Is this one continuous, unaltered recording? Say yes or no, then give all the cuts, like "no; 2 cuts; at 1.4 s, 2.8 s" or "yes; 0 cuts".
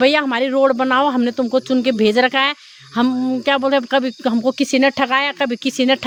yes; 0 cuts